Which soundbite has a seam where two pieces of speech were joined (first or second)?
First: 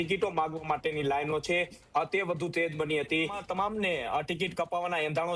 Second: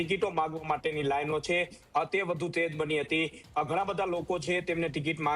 first